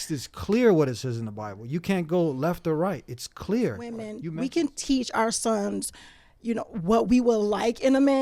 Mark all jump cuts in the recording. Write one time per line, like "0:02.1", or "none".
0:04.1